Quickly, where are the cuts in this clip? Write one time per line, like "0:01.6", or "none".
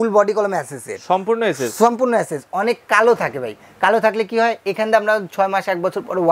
none